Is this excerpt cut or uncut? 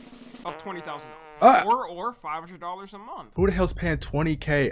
cut